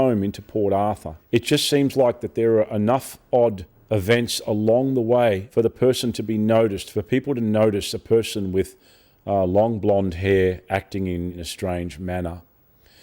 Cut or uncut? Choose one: cut